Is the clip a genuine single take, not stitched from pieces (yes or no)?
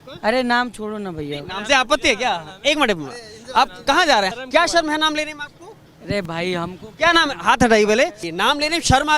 no